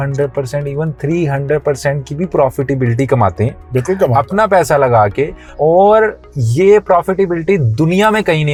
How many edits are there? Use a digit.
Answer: 0